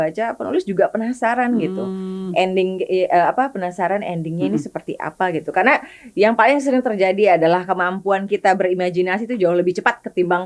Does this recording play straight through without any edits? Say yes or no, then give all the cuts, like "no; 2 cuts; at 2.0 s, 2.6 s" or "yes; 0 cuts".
yes; 0 cuts